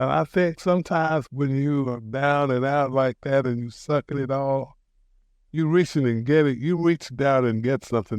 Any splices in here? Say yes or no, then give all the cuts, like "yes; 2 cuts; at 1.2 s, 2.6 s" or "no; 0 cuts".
yes; 1 cut; at 1.3 s